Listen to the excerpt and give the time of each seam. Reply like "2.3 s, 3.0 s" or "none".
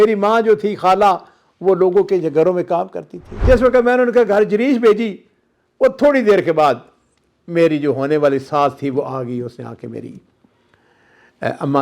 3.4 s